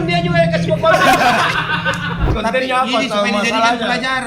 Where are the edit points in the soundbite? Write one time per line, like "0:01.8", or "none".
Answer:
0:02.3